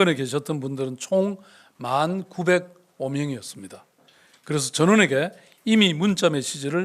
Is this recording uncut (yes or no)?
yes